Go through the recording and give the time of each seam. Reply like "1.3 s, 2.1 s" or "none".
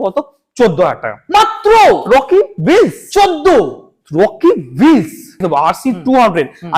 5.4 s

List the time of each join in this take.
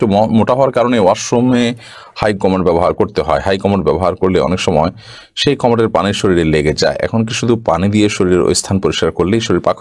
none

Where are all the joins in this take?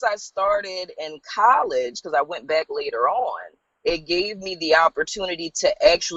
none

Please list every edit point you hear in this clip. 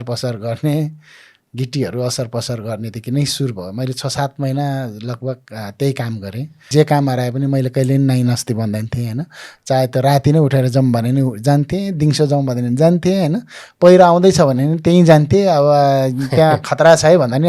6.7 s

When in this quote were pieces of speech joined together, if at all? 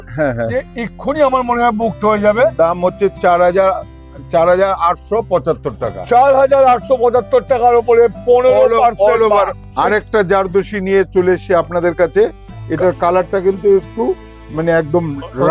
9.6 s

